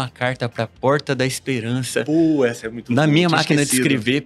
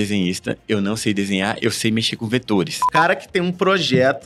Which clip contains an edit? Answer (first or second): second